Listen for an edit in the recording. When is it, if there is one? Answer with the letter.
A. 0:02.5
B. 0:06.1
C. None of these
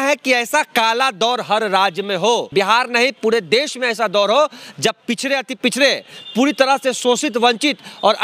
A